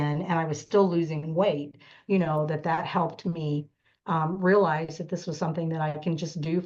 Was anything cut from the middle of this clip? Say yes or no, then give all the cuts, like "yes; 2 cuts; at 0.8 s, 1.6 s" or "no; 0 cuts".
no; 0 cuts